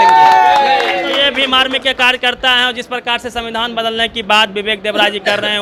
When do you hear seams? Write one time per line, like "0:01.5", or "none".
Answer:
none